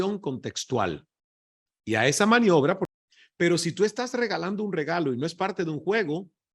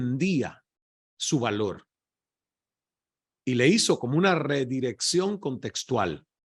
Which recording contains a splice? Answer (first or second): first